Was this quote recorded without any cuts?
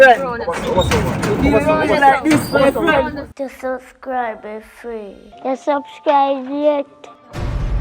no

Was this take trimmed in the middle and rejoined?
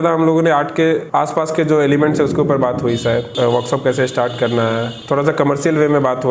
yes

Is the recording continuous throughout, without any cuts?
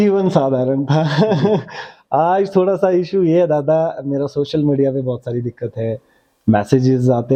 yes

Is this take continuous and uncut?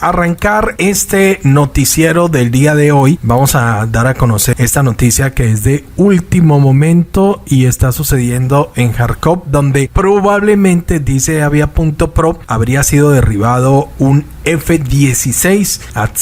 no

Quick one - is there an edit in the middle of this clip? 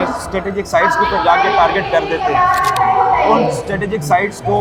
no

